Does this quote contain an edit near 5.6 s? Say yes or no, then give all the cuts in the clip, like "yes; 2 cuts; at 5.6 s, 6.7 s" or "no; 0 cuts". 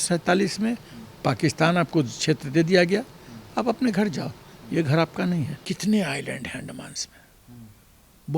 yes; 1 cut; at 5.6 s